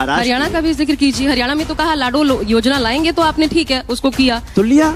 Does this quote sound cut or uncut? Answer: uncut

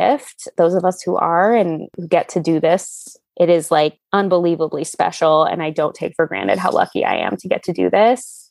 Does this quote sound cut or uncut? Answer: cut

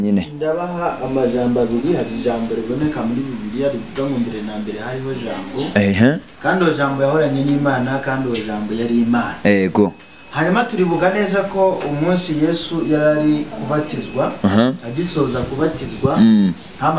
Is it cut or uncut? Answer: uncut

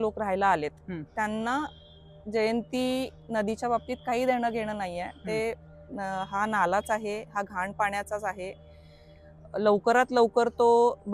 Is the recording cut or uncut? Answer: uncut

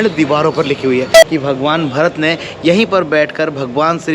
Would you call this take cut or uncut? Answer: cut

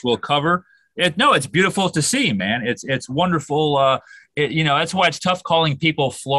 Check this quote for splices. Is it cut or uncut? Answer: uncut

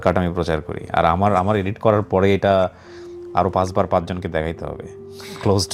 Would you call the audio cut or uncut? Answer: uncut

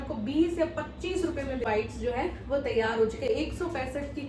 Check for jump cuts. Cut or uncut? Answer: cut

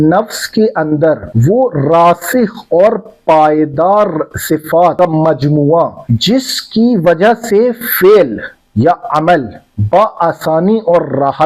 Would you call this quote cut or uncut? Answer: cut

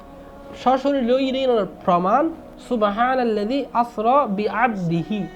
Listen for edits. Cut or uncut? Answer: cut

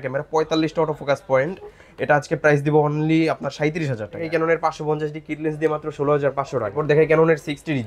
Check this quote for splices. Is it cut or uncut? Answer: cut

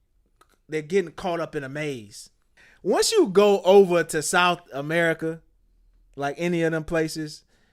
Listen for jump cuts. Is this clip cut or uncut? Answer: cut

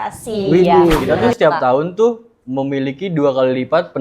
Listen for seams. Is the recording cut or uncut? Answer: cut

